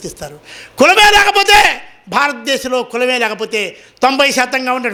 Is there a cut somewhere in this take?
no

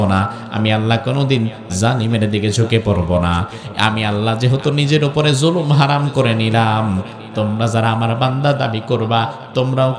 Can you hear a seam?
no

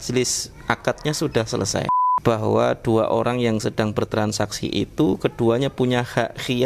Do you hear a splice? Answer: yes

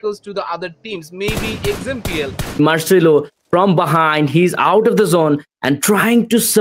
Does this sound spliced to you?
yes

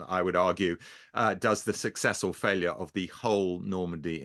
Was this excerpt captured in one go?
yes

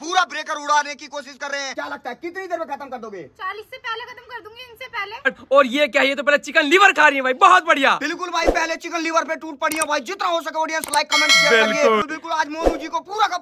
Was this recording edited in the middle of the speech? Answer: yes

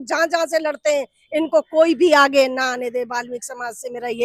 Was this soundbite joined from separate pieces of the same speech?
no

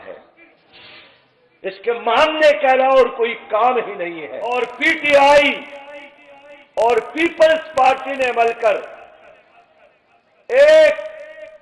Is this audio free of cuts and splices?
no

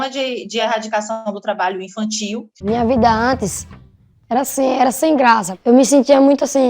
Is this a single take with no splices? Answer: no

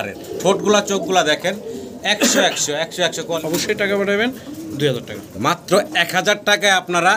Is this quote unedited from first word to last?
no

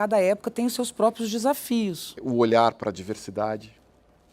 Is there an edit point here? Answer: yes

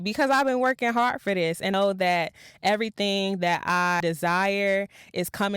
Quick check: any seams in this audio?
yes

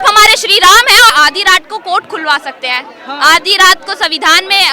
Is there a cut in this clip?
yes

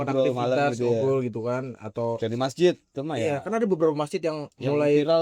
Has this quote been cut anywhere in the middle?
yes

